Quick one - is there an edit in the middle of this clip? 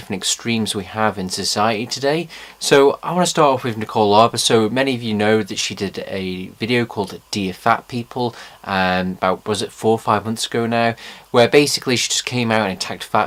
no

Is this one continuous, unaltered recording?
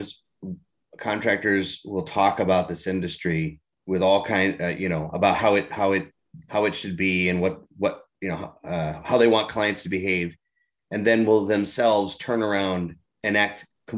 no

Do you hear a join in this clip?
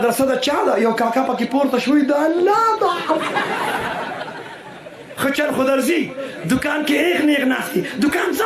no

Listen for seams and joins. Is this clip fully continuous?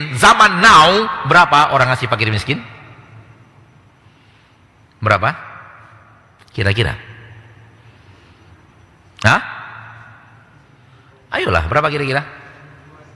yes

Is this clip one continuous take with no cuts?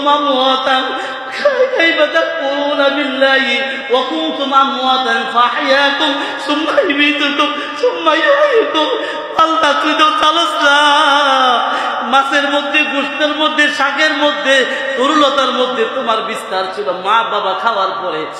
yes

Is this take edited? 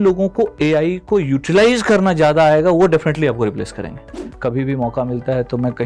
yes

